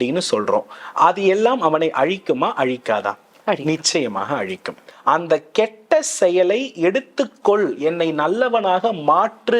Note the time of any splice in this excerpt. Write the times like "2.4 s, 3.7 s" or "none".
4.9 s